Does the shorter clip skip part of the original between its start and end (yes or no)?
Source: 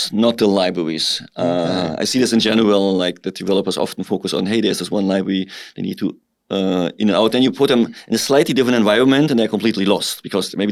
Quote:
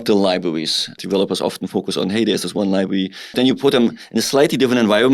yes